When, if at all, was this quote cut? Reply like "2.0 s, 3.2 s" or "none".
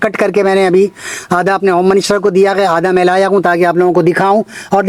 none